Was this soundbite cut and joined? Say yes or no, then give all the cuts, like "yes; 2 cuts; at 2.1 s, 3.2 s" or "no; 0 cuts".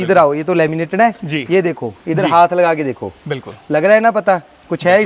no; 0 cuts